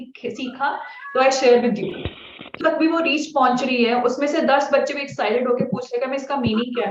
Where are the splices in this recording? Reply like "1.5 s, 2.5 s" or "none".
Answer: 2.5 s